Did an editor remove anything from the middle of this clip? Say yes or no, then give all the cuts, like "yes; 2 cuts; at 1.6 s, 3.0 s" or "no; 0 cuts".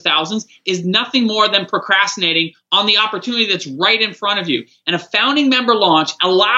no; 0 cuts